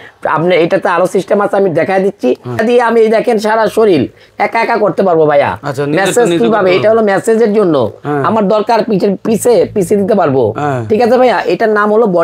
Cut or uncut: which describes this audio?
cut